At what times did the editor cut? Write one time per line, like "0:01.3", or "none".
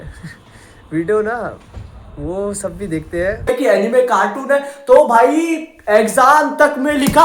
0:03.5

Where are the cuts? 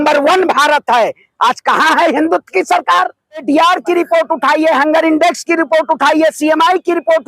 0:03.4

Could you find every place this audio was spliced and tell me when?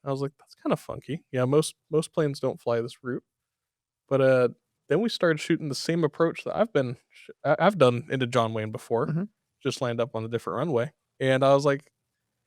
none

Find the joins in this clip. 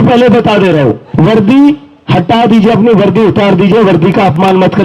0:01.0

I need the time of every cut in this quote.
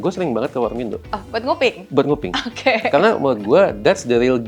0:01.2

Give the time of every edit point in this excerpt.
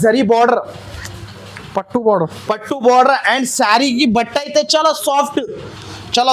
none

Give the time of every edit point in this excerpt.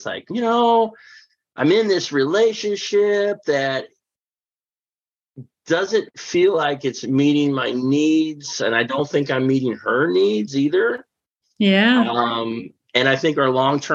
none

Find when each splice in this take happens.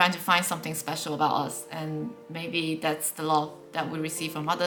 none

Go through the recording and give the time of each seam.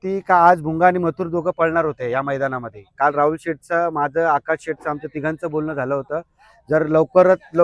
none

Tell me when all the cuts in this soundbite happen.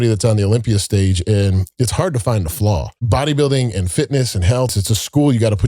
0:03.0
0:04.7

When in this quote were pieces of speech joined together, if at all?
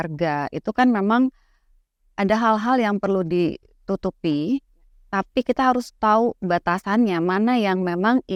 none

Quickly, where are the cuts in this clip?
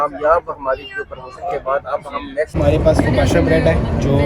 0:02.6

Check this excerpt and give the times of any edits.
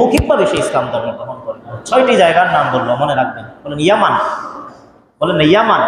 0:01.7

